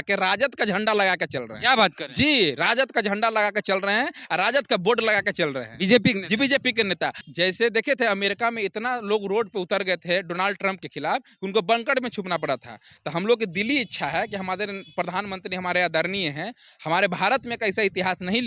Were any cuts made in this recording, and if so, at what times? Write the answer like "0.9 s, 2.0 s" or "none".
7.2 s

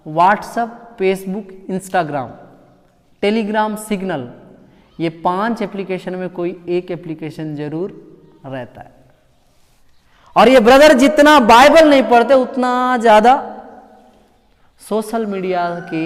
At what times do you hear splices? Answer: none

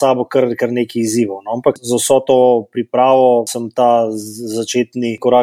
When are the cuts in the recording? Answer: 1.8 s, 3.6 s

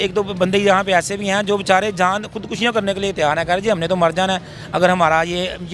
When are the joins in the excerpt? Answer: none

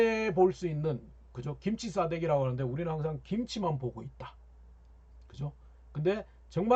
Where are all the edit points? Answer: none

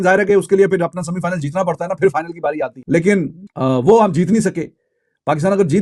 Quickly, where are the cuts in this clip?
none

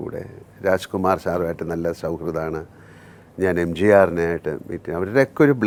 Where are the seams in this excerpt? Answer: none

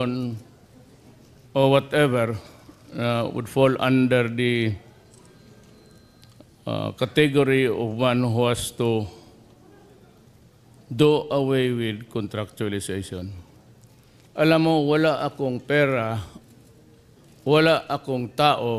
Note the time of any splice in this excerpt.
none

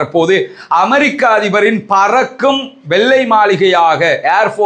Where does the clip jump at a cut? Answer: none

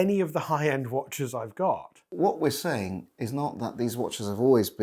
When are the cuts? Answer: 2.0 s

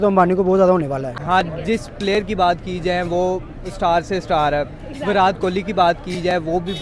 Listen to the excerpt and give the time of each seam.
1.2 s

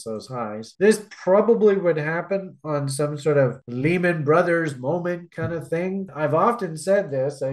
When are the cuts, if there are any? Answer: 6.1 s

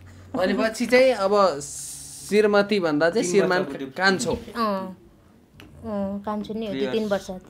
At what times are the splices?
none

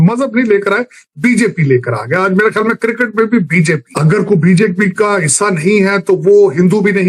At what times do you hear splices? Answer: 3.9 s

